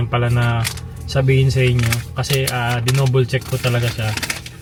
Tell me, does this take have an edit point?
no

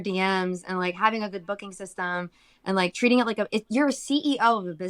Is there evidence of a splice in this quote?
no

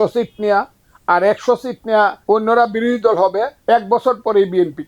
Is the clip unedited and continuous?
no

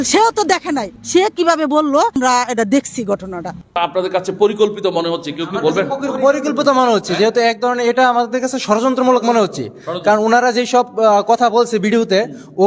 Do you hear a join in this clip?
yes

